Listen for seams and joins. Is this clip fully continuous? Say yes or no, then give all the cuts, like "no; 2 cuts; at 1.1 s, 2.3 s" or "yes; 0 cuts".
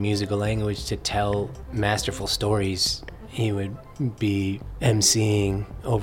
no; 2 cuts; at 3.6 s, 4.7 s